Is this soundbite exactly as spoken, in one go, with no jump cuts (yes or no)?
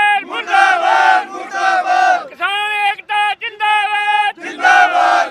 yes